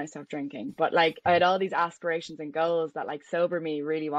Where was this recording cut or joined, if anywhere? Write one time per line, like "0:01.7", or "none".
0:01.2